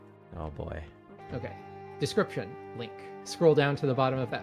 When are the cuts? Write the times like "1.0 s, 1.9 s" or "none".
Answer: 1.0 s, 3.2 s